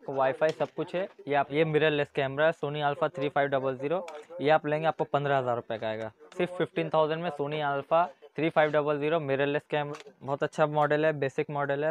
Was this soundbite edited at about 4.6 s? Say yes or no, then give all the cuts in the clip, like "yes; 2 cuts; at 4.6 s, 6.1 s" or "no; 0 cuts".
no; 2 cuts; at 1.5 s, 9.9 s